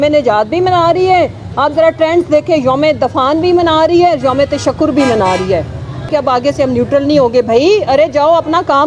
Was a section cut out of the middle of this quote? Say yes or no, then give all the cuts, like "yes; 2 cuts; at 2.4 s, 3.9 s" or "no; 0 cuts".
yes; 1 cut; at 6.1 s